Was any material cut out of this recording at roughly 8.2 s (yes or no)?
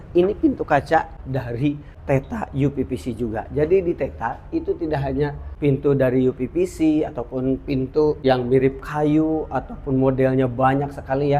yes